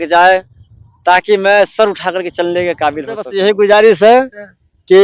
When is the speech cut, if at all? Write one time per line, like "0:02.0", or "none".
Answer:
0:03.3